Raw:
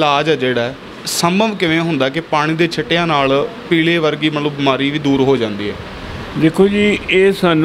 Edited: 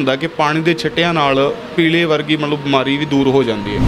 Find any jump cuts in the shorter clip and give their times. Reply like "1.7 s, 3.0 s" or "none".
none